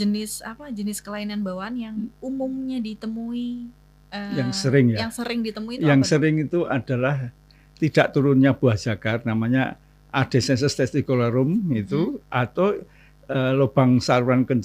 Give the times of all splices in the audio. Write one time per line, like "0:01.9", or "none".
none